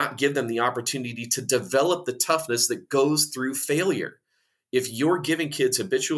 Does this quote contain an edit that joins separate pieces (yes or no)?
no